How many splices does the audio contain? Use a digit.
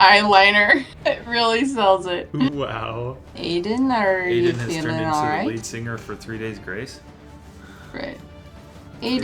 2